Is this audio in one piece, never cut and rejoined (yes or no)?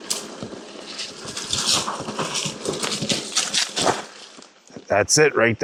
yes